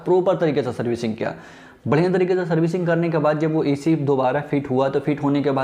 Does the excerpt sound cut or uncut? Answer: uncut